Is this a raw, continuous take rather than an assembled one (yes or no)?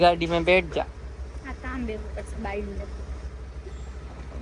yes